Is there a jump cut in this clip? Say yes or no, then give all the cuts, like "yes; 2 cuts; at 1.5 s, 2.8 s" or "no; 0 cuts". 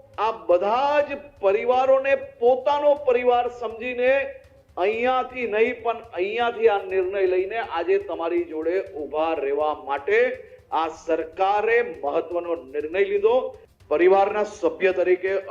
yes; 1 cut; at 13.6 s